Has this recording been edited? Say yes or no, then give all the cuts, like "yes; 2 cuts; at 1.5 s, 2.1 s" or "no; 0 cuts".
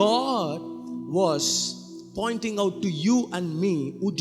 no; 0 cuts